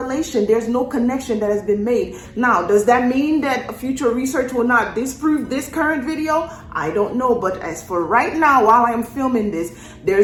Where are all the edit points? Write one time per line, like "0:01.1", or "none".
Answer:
none